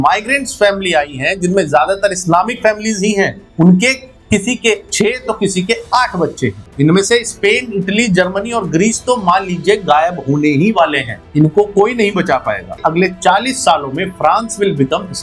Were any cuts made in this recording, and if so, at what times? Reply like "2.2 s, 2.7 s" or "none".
6.6 s, 12.8 s